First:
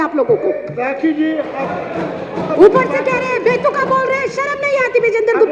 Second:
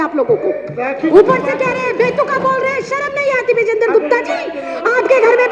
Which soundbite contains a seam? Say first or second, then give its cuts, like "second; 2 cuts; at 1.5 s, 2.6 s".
second; 1 cut; at 1.1 s